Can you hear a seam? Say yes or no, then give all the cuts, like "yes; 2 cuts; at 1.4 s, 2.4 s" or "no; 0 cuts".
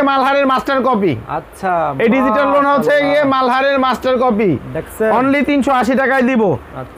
no; 0 cuts